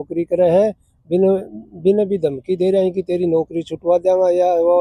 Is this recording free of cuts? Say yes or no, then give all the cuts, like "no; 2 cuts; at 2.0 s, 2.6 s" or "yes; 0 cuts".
yes; 0 cuts